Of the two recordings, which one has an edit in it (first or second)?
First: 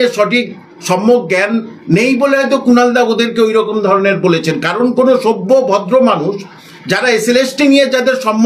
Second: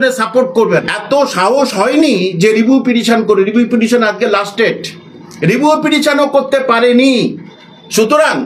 second